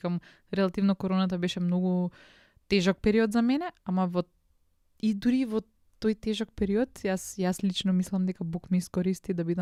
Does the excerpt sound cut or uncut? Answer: uncut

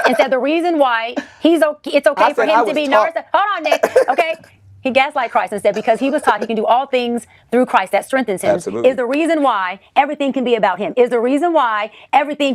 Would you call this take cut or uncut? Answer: uncut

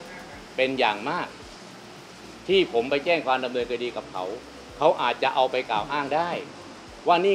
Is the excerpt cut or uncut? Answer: uncut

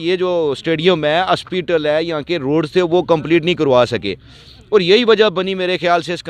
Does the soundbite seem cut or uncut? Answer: uncut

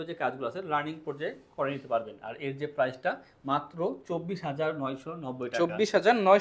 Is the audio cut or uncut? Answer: uncut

